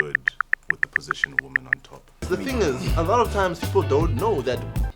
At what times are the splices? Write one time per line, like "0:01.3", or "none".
0:02.1